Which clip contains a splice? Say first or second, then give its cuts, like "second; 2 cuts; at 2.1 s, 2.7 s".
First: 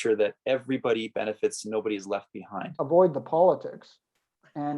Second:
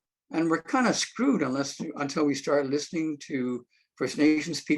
first; 1 cut; at 2.8 s